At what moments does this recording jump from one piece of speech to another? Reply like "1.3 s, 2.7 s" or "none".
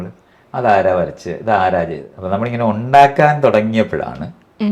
2.1 s